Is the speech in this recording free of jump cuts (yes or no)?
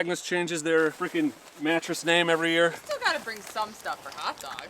no